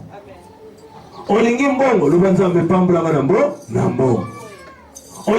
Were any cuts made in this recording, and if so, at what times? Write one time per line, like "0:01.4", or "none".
none